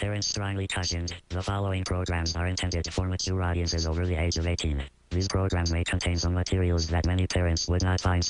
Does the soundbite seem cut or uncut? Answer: cut